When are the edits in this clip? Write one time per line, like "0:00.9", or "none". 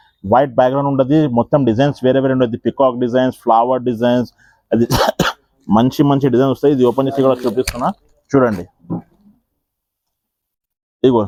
none